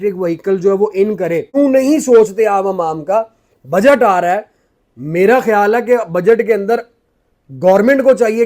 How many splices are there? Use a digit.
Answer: 1